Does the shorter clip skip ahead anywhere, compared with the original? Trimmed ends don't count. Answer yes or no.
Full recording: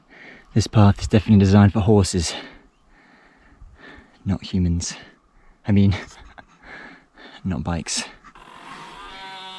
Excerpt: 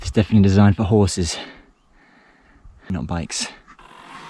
yes